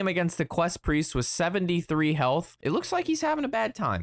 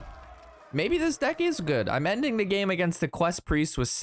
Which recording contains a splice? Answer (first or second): first